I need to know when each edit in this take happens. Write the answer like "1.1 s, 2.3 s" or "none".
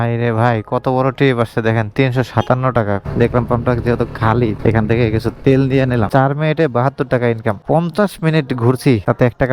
3.2 s, 6.1 s, 7.6 s